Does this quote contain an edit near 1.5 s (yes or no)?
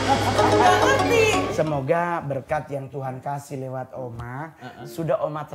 yes